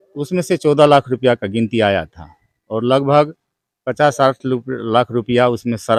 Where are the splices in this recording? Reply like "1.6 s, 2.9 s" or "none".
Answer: none